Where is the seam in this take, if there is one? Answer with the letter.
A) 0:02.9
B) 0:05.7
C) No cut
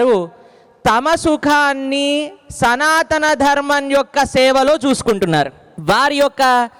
B